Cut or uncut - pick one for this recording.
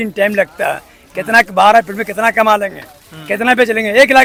uncut